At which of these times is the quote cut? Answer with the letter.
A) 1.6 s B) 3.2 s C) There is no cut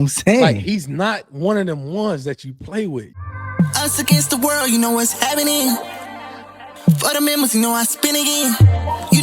B